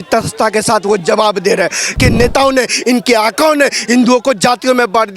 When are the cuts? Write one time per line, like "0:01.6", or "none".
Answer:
0:01.9